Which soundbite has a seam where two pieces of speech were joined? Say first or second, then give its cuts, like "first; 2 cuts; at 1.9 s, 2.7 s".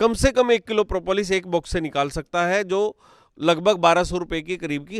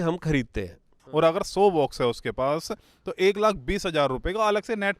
second; 1 cut; at 1.0 s